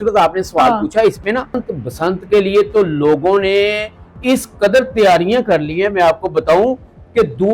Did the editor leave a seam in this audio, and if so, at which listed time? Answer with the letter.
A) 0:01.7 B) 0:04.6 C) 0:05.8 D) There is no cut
A